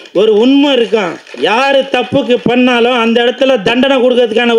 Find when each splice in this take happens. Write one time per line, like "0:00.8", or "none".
0:01.2